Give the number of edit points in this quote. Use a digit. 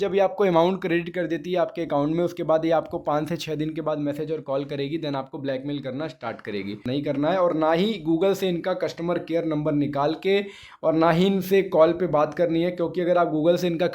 1